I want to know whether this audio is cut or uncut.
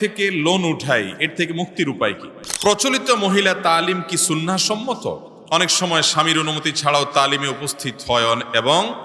cut